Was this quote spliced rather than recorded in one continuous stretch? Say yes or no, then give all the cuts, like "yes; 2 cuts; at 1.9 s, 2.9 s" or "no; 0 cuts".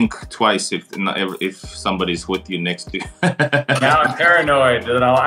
no; 0 cuts